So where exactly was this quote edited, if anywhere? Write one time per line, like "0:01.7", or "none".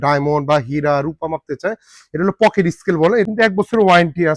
0:03.3